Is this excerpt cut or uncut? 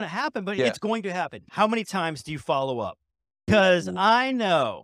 cut